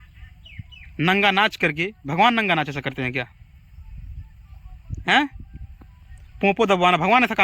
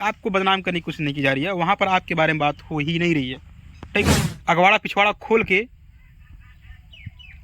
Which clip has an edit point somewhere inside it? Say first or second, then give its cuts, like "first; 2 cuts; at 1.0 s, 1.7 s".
second; 1 cut; at 4.2 s